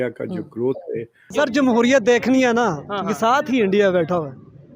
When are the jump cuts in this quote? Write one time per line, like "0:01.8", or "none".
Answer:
0:01.3